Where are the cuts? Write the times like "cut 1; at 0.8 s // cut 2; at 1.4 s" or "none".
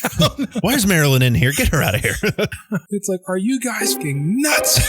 cut 1; at 2.6 s // cut 2; at 3.9 s